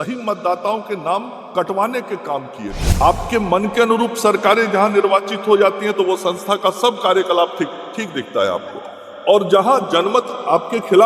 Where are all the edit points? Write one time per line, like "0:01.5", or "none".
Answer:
0:02.9